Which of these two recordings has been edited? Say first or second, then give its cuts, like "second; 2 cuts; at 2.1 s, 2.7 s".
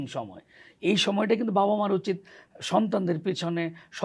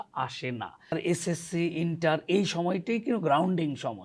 second; 1 cut; at 0.9 s